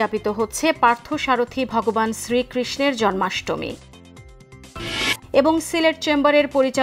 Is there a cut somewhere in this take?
no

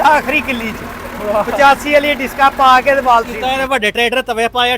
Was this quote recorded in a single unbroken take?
no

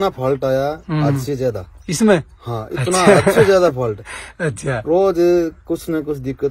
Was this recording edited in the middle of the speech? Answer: no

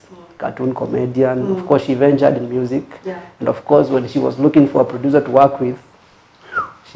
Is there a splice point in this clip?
no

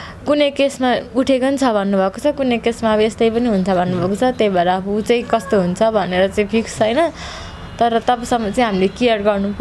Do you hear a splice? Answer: no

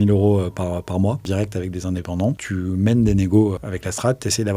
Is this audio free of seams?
no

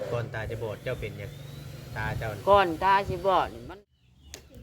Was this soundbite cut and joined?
yes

